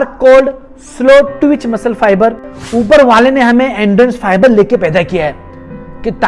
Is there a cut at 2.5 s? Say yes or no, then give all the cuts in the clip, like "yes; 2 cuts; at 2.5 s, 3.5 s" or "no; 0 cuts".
yes; 1 cut; at 2.5 s